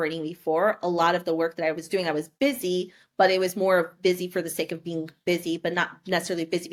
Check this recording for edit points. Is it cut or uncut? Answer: uncut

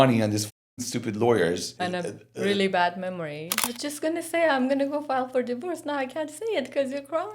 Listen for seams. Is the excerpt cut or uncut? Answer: cut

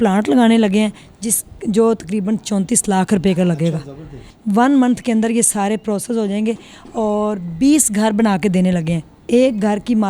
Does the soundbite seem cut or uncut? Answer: cut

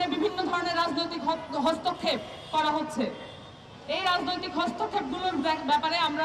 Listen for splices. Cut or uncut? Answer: uncut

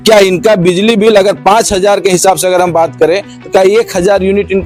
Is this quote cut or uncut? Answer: uncut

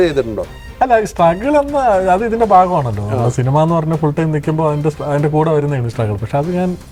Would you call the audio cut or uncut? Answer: uncut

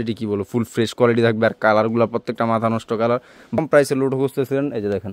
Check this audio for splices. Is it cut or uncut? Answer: cut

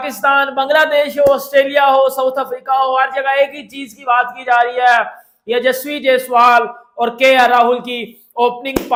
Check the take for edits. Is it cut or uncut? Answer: uncut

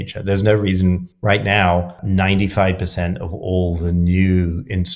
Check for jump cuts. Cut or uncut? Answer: cut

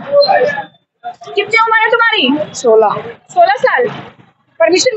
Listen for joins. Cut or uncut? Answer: uncut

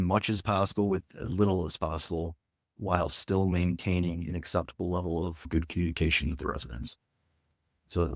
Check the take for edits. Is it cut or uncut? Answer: uncut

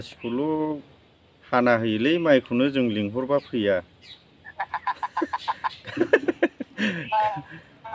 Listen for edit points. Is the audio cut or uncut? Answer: uncut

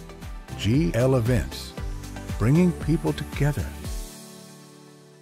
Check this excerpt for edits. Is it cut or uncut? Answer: uncut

